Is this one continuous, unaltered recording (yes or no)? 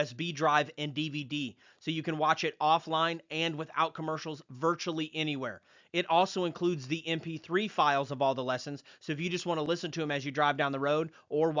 yes